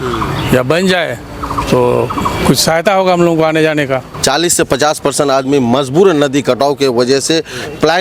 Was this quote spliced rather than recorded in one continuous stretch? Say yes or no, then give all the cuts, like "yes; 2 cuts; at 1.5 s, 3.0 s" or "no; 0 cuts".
yes; 1 cut; at 4.1 s